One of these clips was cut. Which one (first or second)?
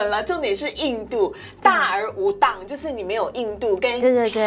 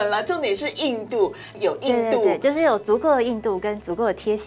second